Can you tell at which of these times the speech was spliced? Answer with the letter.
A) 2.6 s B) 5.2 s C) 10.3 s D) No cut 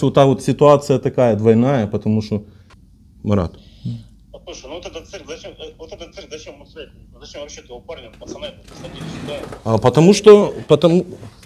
A